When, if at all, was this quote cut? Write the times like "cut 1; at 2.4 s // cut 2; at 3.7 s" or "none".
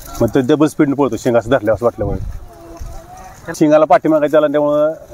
cut 1; at 3.6 s